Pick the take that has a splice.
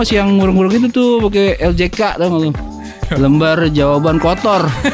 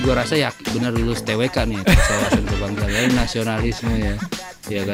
first; 1 cut; at 2.9 s

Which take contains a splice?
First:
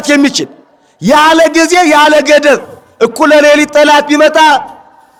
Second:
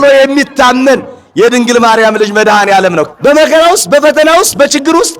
second; 1 cut; at 3.1 s

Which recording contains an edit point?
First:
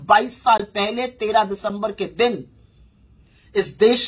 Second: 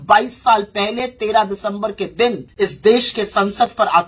second; 1 cut; at 2.5 s

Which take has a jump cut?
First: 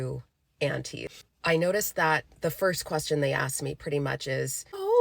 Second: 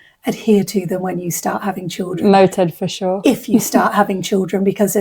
first; 1 cut; at 1.1 s

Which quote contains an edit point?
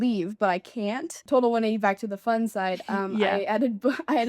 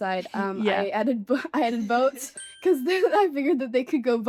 first; 1 cut; at 1.2 s

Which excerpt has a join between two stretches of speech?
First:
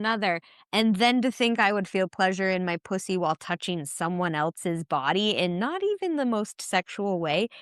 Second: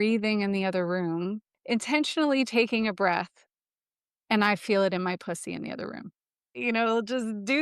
second; 2 cuts; at 1.5 s, 6.6 s

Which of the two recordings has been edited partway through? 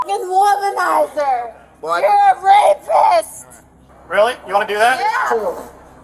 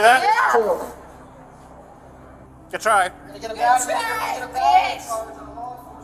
first; 1 cut; at 3.9 s

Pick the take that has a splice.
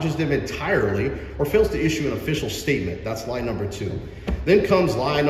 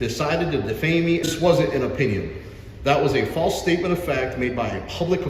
second; 1 cut; at 1.3 s

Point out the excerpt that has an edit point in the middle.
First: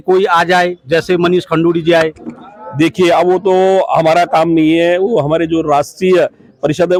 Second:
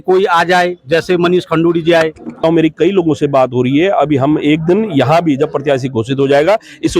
second; 1 cut; at 2.4 s

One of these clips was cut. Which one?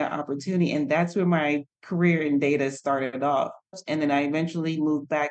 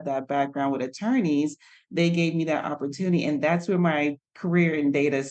first; 1 cut; at 3.8 s

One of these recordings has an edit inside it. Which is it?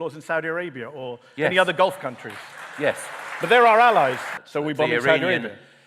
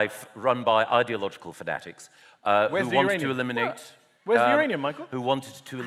first; 1 cut; at 4.4 s

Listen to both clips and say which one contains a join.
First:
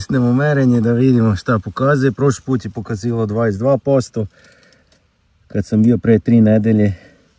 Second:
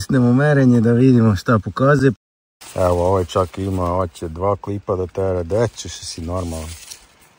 second; 1 cut; at 2.2 s

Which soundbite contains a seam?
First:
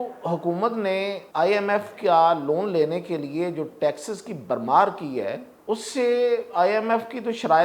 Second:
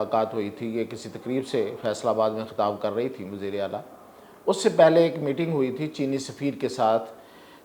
first; 2 cuts; at 1.2 s, 5.5 s

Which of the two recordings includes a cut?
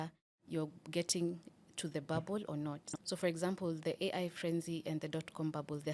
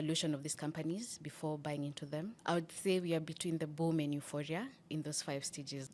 second; 1 cut; at 2.3 s

